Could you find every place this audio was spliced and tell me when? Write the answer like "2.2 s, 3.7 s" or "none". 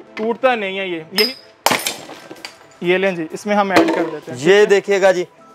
1.3 s